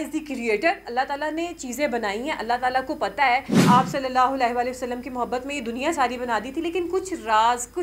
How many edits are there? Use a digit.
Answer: 1